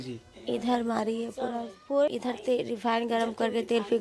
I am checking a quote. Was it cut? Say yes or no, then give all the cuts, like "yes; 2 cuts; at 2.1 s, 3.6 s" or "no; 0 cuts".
yes; 1 cut; at 2.1 s